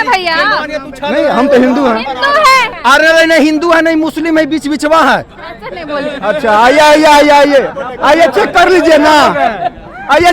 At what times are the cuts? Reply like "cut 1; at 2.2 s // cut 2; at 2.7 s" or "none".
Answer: cut 1; at 2.7 s